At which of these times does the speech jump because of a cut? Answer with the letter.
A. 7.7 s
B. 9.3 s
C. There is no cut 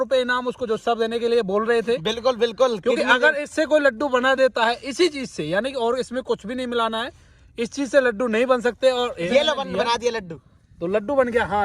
B